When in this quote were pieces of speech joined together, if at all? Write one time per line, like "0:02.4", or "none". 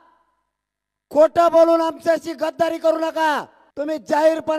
0:03.6